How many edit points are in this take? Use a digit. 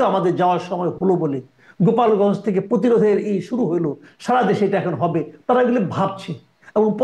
0